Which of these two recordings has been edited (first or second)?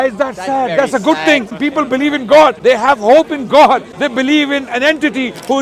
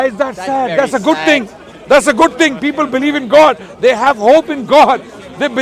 first